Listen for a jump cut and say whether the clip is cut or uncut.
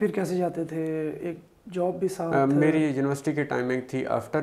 uncut